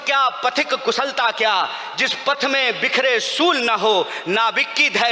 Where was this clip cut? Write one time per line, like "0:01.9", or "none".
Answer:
none